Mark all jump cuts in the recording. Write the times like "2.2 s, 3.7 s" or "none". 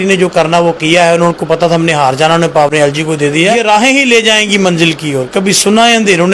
3.5 s